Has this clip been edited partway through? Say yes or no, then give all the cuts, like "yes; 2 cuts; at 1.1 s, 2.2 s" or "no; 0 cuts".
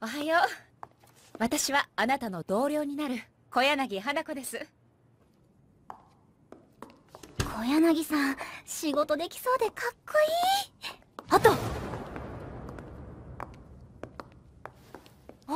no; 0 cuts